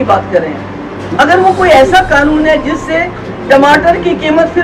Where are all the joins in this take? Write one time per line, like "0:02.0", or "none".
none